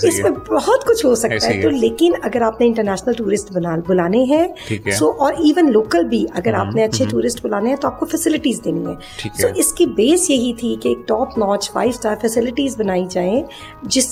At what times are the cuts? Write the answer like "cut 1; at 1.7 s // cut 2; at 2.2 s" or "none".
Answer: none